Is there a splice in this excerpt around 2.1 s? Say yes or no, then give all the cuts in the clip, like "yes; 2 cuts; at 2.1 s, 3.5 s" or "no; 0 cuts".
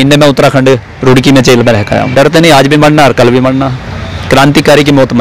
yes; 1 cut; at 2.1 s